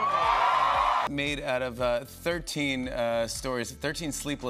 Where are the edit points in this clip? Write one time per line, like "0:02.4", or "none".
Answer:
0:01.1